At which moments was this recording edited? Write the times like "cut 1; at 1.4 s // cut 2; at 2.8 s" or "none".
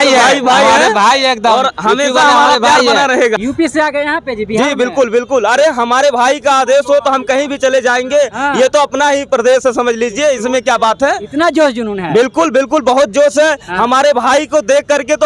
cut 1; at 3.4 s